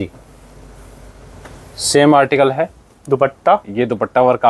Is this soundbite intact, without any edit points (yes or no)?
yes